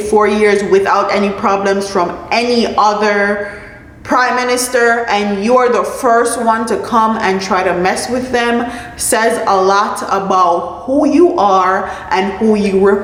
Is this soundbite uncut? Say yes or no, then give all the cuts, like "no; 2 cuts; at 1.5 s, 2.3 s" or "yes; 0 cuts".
yes; 0 cuts